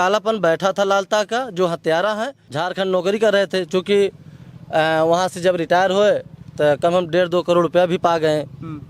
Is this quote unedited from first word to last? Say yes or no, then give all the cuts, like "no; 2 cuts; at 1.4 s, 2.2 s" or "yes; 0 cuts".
no; 1 cut; at 2.4 s